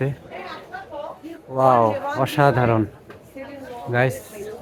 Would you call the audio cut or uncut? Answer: uncut